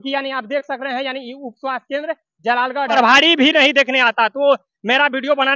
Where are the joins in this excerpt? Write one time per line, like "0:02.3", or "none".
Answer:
0:03.0